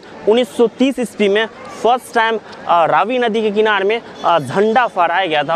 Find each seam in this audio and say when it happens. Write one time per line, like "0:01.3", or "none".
none